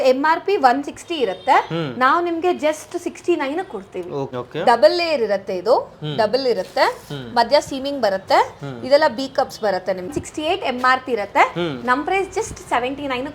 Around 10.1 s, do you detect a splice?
yes; 2 cuts; at 4.3 s, 10.1 s

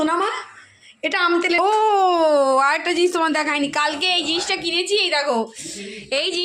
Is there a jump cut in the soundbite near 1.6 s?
yes; 1 cut; at 1.6 s

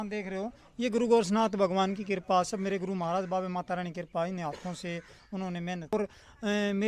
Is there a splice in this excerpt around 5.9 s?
yes; 1 cut; at 5.9 s

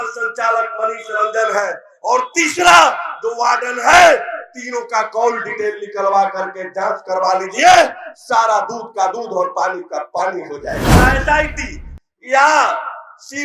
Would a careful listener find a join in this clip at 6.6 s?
no; 1 cut; at 11.0 s

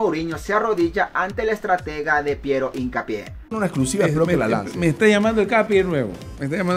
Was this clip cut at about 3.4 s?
yes; 1 cut; at 3.4 s

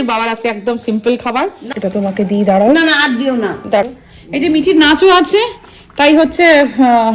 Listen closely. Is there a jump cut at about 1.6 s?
yes; 2 cuts; at 1.6 s, 3.8 s

